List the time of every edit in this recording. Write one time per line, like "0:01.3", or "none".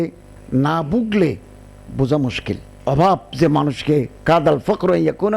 0:02.7